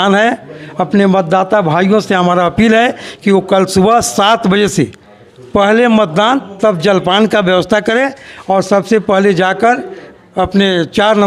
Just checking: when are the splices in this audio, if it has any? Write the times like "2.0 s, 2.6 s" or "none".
none